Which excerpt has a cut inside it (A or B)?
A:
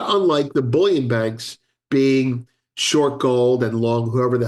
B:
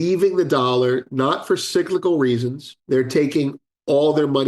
B